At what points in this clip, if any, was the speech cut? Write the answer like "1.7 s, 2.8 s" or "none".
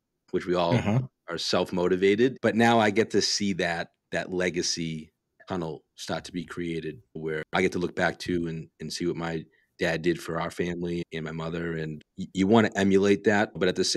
2.4 s